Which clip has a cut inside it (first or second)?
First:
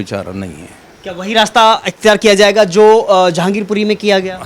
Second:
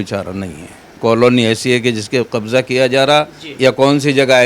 second